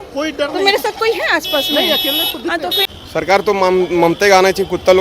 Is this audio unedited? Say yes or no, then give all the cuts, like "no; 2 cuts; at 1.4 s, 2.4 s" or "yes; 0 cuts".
no; 1 cut; at 2.9 s